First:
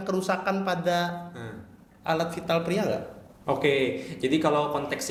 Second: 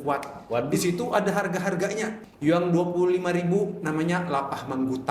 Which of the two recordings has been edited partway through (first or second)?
second